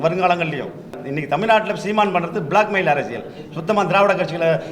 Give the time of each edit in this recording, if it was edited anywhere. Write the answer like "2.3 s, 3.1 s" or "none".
1.0 s